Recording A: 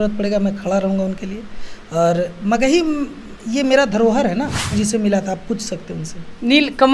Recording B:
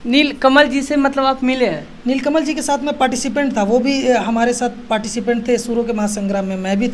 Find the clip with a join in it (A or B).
A